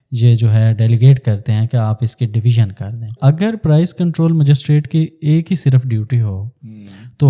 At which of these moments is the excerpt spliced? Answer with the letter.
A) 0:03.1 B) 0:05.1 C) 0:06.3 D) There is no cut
A